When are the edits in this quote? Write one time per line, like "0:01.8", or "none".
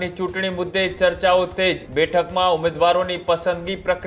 0:01.8